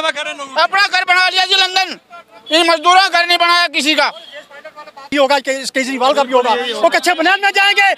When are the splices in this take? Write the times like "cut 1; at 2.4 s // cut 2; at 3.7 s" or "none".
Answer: cut 1; at 5.1 s